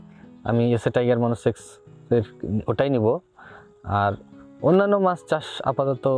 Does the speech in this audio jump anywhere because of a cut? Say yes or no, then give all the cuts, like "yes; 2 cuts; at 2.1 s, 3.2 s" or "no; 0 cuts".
no; 0 cuts